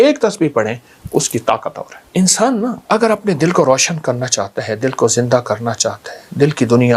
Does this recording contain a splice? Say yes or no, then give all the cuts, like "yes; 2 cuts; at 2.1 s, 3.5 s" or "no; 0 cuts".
yes; 2 cuts; at 1.9 s, 2.8 s